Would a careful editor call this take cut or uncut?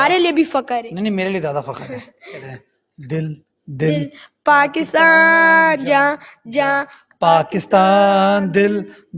cut